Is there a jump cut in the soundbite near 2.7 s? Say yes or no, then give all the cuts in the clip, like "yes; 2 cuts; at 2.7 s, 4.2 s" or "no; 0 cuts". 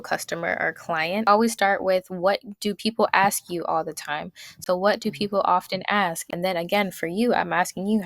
no; 3 cuts; at 1.2 s, 4.6 s, 6.3 s